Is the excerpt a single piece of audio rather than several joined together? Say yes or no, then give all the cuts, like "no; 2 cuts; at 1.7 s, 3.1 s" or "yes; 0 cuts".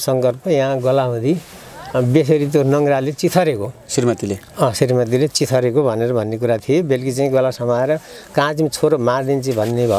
yes; 0 cuts